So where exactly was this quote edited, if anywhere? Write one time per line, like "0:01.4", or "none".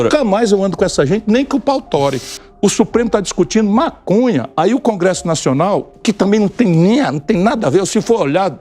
0:02.3